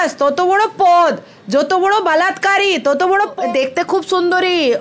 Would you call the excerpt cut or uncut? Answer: cut